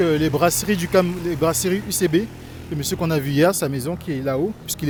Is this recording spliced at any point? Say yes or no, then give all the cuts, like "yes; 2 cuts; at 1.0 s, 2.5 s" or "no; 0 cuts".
no; 0 cuts